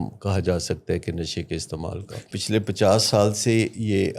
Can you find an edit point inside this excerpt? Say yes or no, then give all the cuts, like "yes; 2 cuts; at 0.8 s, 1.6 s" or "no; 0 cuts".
yes; 1 cut; at 2.2 s